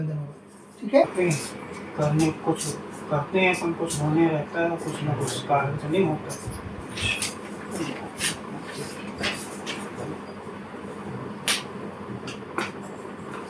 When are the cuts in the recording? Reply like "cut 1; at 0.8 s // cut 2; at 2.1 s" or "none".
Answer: cut 1; at 1.0 s